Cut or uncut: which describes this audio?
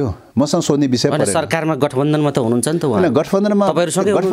uncut